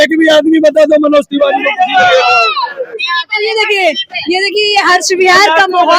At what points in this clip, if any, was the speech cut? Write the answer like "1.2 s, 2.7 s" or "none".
none